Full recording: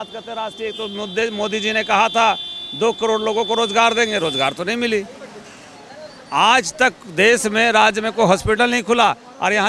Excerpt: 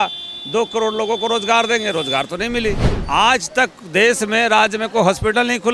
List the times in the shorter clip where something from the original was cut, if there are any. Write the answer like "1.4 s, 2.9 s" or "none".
2.9 s